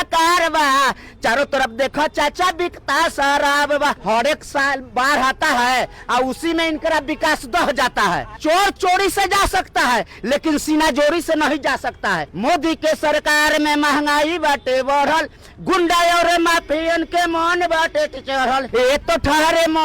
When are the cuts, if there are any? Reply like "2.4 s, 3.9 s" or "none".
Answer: 4.0 s, 8.4 s, 12.3 s, 18.7 s